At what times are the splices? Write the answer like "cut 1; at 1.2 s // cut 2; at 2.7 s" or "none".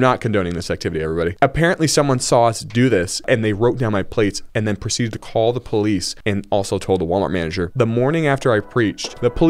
cut 1; at 4.4 s // cut 2; at 6.1 s